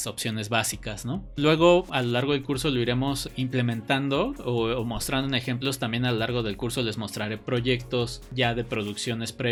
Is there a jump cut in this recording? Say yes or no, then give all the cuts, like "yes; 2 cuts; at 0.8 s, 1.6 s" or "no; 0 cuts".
no; 0 cuts